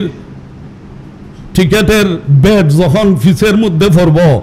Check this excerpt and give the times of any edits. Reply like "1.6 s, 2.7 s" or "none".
none